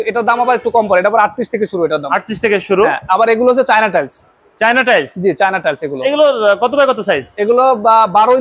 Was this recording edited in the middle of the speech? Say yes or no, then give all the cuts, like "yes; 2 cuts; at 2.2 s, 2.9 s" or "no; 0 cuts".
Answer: no; 0 cuts